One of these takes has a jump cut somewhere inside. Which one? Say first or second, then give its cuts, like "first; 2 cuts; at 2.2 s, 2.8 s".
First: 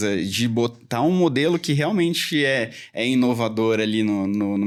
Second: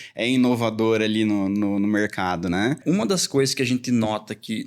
second; 1 cut; at 2.8 s